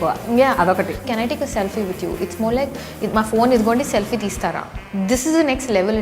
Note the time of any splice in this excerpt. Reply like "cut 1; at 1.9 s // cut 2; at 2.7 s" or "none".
cut 1; at 1.0 s